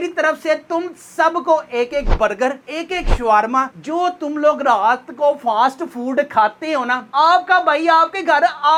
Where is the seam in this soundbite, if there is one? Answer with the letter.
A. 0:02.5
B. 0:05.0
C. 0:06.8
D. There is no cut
D